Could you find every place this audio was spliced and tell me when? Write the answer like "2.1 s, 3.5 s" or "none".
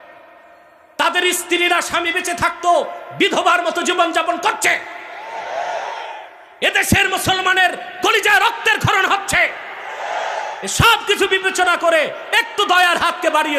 none